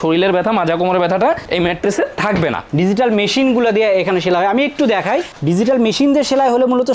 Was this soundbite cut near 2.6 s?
yes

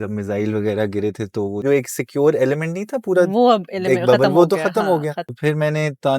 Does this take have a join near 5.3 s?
yes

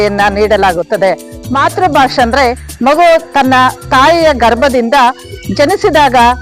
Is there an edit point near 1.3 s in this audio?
yes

